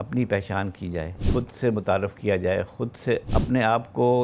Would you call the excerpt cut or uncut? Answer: cut